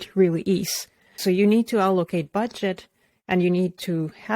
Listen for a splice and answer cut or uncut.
cut